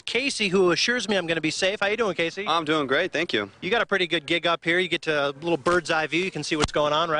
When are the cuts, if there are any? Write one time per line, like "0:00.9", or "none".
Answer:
none